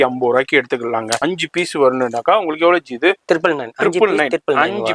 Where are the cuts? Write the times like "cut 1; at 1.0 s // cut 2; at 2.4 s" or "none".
cut 1; at 1.2 s